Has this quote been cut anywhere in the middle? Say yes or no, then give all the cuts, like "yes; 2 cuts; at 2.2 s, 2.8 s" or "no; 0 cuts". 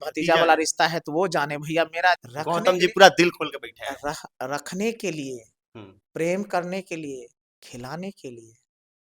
yes; 1 cut; at 2.2 s